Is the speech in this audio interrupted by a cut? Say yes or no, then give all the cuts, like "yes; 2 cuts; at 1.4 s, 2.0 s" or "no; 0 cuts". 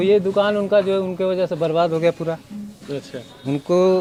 no; 0 cuts